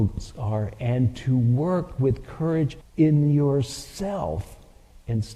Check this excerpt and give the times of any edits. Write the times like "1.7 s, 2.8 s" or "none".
2.8 s